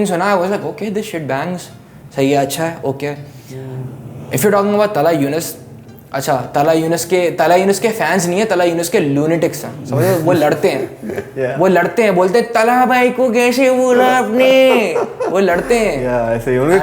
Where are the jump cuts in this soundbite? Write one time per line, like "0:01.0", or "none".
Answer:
none